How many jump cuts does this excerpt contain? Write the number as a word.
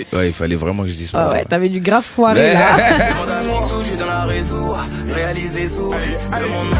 one